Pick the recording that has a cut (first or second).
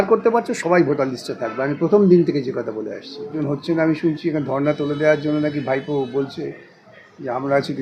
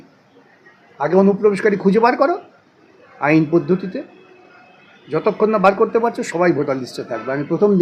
first